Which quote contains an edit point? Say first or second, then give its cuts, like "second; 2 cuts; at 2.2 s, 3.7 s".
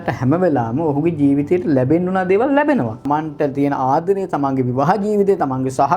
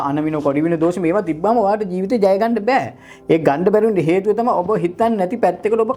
first; 1 cut; at 3.1 s